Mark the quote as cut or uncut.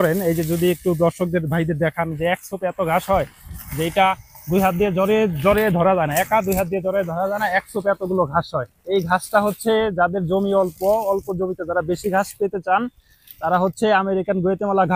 uncut